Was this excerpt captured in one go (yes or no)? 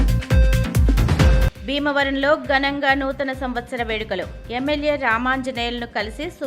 yes